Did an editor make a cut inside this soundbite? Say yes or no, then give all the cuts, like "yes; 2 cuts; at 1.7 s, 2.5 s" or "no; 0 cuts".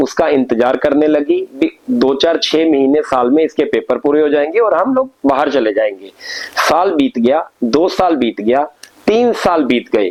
no; 0 cuts